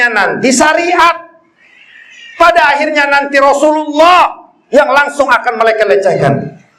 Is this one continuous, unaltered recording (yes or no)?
yes